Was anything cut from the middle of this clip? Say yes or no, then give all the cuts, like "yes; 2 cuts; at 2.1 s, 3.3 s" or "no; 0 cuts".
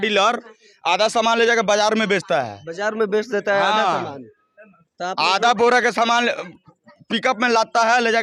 no; 0 cuts